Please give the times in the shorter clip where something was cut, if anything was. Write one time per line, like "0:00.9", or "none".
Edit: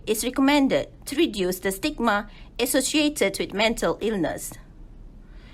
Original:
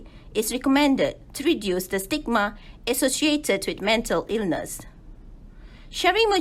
none